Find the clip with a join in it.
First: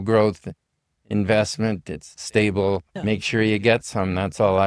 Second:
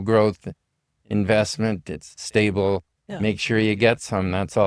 first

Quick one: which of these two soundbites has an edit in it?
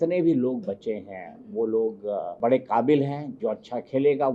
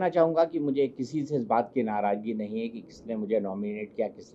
first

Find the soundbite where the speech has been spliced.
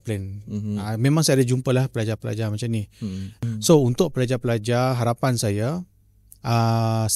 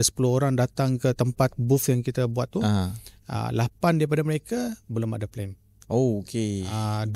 first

